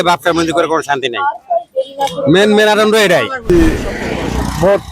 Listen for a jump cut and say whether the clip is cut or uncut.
cut